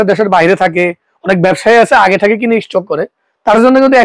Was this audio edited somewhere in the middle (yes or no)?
no